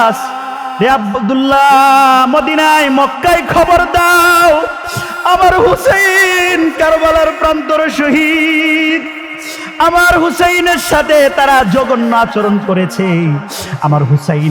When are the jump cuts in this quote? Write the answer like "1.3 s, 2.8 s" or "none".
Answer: none

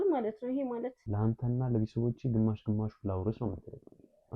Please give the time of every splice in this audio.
1.0 s

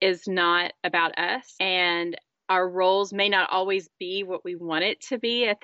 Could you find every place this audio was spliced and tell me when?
none

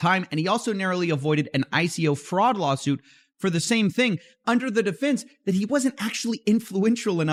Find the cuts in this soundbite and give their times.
none

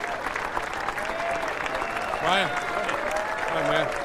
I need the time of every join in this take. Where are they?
none

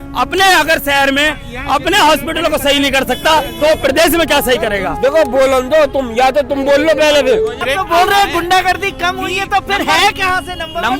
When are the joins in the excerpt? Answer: 4.9 s, 7.6 s

